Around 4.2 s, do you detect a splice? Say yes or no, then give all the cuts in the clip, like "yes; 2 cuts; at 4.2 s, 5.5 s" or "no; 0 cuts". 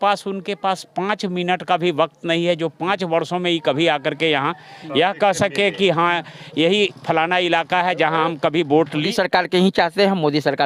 no; 1 cut; at 9.1 s